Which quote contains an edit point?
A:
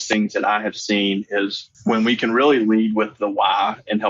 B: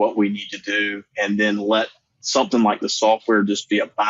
A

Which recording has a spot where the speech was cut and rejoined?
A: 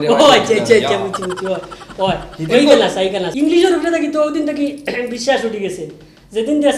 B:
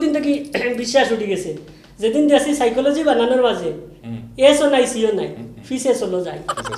A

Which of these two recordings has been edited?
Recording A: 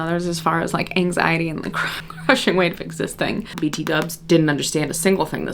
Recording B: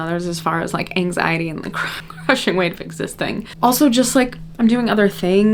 A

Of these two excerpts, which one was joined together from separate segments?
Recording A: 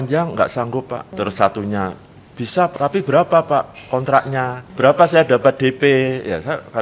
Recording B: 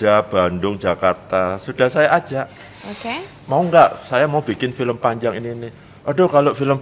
A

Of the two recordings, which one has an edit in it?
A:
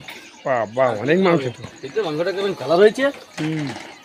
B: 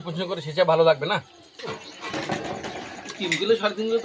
B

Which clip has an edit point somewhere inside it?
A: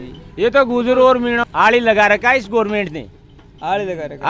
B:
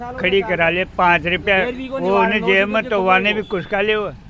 A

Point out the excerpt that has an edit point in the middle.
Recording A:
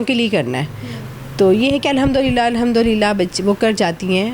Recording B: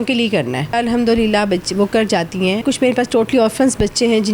B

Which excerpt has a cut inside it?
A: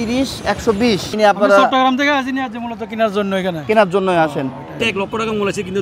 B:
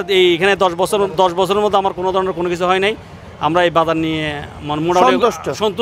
A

